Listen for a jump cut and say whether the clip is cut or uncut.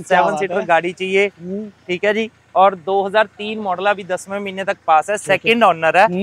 uncut